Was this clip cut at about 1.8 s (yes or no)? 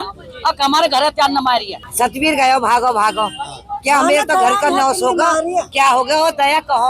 yes